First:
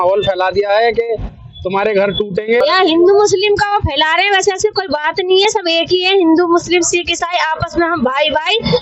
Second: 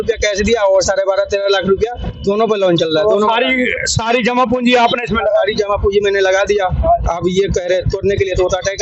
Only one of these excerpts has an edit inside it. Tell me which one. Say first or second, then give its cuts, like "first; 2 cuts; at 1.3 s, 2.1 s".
first; 1 cut; at 2.6 s